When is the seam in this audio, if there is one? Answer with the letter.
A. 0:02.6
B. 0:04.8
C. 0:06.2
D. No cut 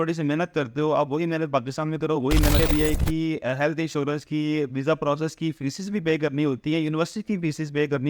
A